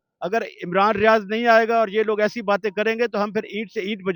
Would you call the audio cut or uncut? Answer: uncut